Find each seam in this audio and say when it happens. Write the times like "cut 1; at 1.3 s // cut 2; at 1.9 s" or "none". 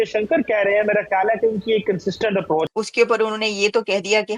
cut 1; at 2.7 s